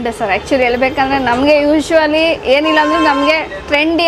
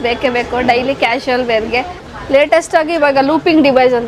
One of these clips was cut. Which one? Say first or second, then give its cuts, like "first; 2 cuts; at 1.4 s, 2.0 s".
second; 1 cut; at 2.0 s